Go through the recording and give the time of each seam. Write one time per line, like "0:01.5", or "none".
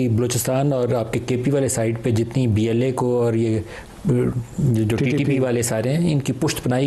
none